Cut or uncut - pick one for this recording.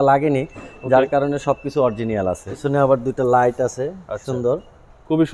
cut